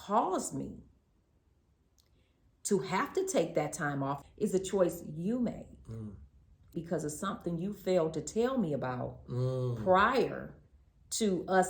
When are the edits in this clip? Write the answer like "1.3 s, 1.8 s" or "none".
4.2 s